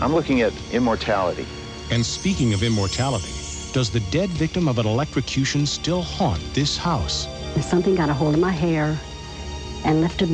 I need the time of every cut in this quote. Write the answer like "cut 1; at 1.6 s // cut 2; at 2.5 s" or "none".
cut 1; at 4.1 s

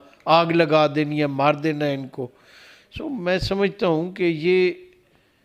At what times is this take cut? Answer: none

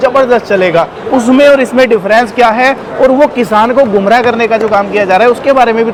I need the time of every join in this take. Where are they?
none

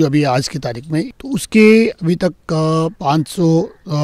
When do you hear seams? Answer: cut 1; at 1.1 s // cut 2; at 3.0 s

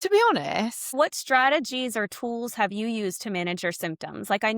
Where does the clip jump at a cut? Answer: cut 1; at 0.9 s

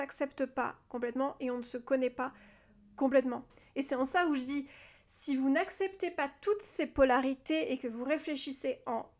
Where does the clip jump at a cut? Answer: cut 1; at 3.6 s

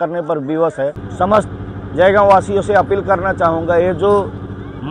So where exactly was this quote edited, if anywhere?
cut 1; at 1.0 s

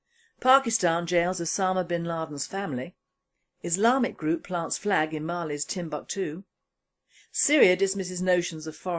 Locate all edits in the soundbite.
none

